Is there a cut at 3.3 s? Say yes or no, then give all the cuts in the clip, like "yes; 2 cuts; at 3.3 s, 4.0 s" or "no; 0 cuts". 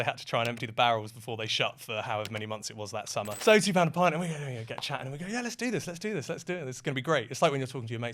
yes; 1 cut; at 3.3 s